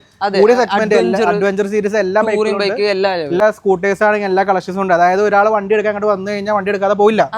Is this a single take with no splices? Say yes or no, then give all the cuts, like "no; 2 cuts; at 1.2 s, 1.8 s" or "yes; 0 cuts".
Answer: no; 1 cut; at 3.4 s